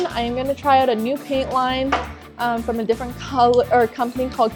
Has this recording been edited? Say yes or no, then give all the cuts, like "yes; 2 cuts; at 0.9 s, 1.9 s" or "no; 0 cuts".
no; 0 cuts